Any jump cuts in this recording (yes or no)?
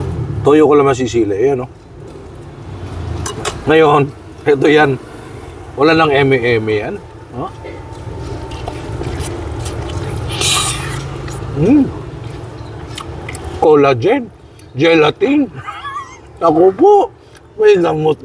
no